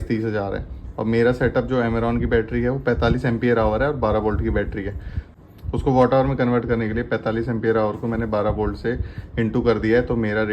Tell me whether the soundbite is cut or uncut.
cut